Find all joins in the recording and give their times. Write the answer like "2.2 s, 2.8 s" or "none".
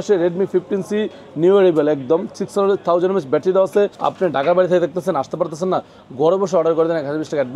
4.0 s